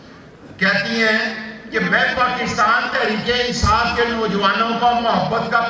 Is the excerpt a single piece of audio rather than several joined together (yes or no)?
yes